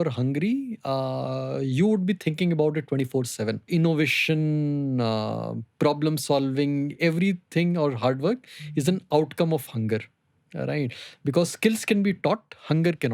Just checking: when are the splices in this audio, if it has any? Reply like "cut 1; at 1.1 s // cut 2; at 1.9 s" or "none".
cut 1; at 3.7 s

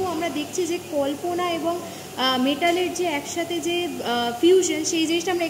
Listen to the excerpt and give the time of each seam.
none

